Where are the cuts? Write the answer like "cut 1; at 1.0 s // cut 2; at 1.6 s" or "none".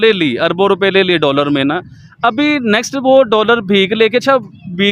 none